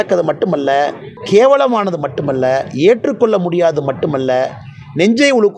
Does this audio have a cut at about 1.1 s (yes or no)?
yes